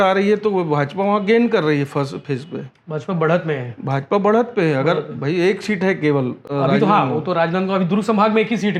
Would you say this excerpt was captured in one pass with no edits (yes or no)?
yes